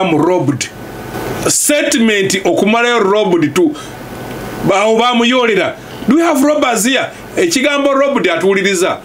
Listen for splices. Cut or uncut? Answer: cut